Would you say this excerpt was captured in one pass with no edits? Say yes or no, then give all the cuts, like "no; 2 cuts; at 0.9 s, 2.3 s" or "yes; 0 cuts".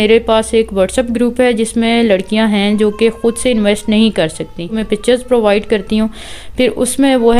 no; 1 cut; at 4.8 s